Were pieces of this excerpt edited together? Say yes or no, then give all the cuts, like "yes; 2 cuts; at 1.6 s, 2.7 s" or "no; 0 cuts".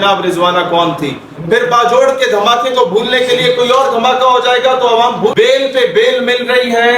yes; 1 cut; at 5.3 s